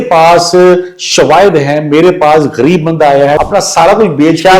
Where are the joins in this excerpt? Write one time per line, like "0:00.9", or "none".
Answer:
0:03.4